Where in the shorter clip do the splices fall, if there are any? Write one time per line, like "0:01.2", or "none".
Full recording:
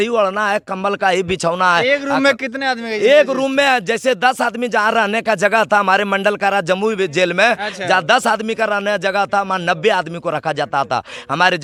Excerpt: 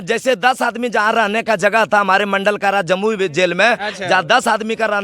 none